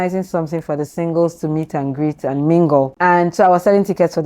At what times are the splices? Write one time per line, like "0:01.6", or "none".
0:02.9